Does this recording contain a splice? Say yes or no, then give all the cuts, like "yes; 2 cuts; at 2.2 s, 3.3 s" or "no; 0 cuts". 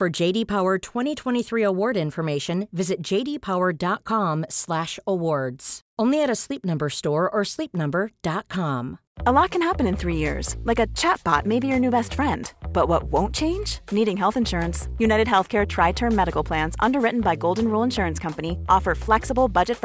yes; 1 cut; at 9.0 s